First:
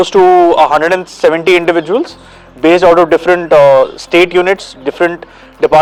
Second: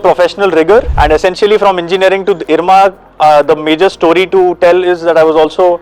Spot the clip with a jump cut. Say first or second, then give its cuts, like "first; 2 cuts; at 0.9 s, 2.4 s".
second; 1 cut; at 0.9 s